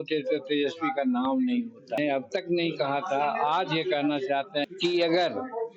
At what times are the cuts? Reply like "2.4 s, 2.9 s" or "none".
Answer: 2.0 s, 4.6 s